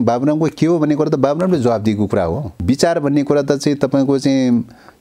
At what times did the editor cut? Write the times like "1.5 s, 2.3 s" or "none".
2.5 s